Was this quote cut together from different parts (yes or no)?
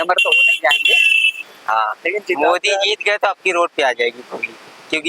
yes